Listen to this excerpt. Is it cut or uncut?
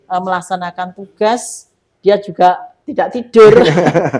cut